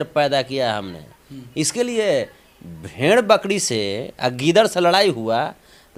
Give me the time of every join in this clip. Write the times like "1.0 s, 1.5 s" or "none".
none